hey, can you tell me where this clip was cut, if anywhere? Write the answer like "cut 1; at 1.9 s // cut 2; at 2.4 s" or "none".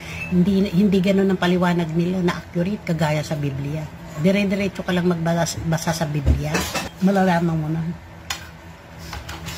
cut 1; at 6.9 s